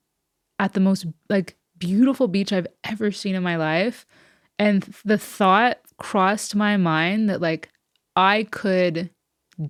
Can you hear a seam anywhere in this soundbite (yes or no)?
no